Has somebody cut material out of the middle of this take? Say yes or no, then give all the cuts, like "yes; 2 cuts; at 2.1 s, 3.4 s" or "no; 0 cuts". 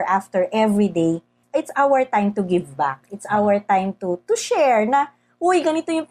yes; 1 cut; at 1.4 s